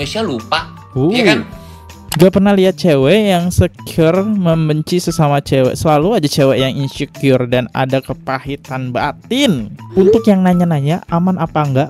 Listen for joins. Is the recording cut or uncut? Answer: cut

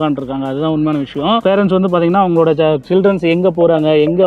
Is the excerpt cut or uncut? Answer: cut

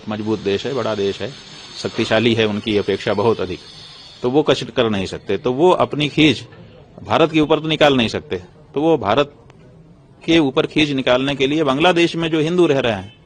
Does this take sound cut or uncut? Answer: uncut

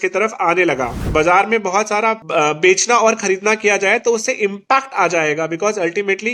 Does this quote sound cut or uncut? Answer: cut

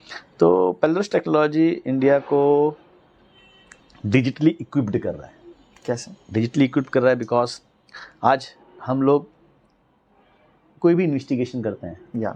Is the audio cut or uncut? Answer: uncut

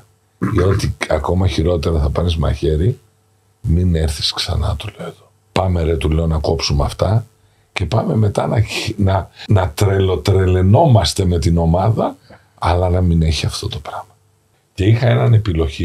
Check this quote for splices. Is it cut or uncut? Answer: cut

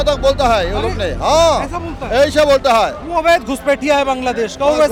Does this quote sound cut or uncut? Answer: uncut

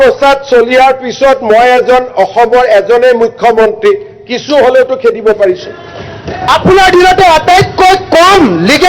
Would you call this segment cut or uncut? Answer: cut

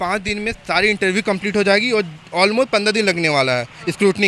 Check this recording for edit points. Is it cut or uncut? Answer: uncut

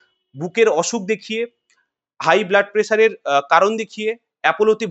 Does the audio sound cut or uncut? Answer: uncut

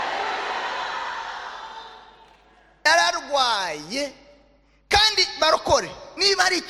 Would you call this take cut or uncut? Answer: cut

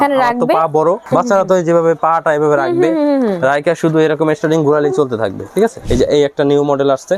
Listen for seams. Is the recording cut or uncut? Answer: cut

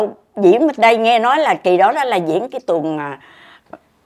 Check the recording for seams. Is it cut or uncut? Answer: uncut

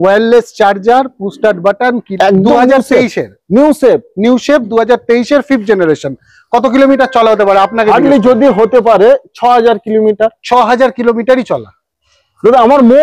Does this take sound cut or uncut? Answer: cut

